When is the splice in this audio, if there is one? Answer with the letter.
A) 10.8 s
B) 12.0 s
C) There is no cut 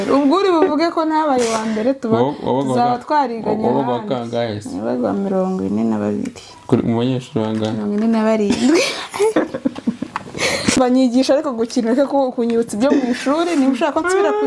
A